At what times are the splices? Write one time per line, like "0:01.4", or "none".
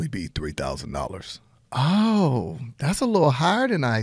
none